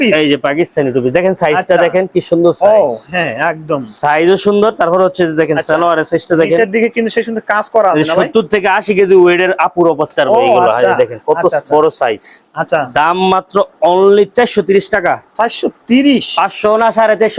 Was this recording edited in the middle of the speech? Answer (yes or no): no